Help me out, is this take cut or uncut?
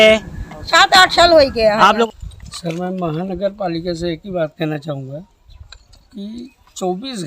cut